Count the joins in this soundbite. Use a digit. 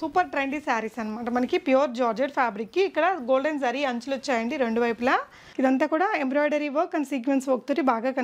1